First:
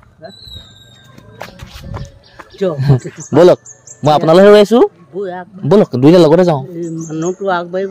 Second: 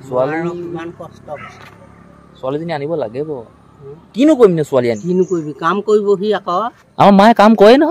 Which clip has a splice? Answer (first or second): second